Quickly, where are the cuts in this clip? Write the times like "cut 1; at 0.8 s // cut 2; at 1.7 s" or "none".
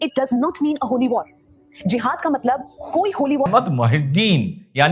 cut 1; at 3.5 s